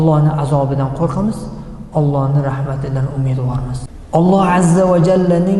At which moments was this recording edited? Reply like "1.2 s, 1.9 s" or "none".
3.9 s

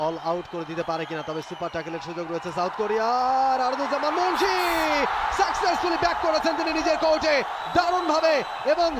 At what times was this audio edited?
none

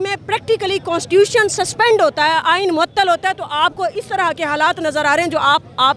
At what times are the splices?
none

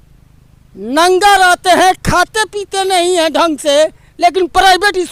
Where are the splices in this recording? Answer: none

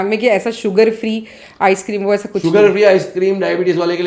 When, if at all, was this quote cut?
none

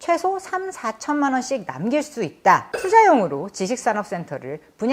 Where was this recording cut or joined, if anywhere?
2.7 s

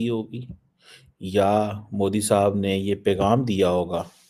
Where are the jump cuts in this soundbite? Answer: none

